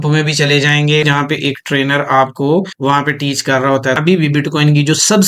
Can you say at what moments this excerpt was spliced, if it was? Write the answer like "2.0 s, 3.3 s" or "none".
1.1 s, 2.7 s, 4.0 s

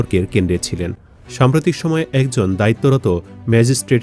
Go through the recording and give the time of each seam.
none

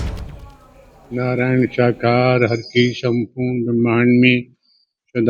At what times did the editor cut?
1.1 s

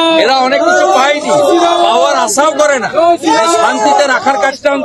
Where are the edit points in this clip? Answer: none

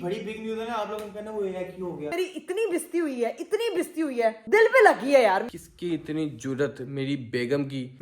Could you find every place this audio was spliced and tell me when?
2.1 s, 4.4 s, 5.5 s

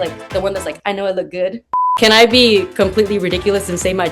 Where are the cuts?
1.8 s

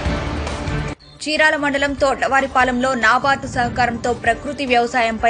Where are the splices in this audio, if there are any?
1.0 s

